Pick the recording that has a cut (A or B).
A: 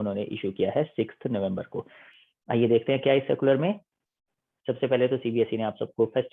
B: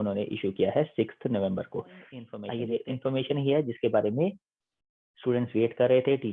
B